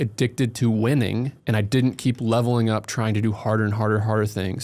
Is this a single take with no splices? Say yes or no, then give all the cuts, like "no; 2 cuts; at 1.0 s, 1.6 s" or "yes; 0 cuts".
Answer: no; 1 cut; at 1.4 s